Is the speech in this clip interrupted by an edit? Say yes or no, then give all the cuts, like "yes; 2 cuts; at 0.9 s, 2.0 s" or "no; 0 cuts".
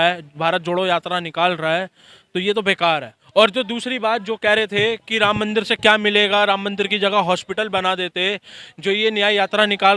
yes; 1 cut; at 3.2 s